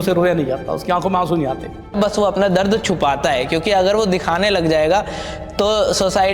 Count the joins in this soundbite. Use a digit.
1